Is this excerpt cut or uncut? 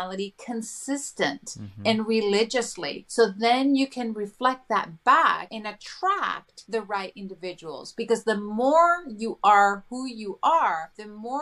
uncut